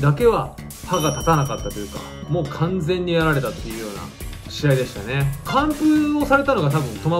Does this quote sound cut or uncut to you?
uncut